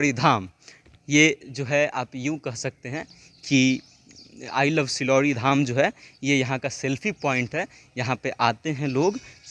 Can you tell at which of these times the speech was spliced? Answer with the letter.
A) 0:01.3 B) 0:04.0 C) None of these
C